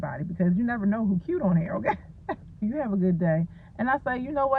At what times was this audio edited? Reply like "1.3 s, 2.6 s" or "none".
2.6 s